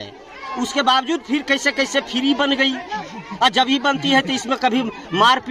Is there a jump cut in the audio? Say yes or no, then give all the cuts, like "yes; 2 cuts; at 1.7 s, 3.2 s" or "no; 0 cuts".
no; 0 cuts